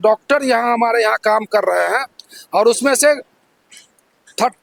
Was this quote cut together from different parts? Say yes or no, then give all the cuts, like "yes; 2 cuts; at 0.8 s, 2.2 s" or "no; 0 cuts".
no; 0 cuts